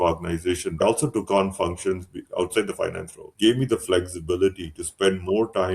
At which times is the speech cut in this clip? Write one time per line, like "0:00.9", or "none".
0:00.8
0:02.2
0:03.3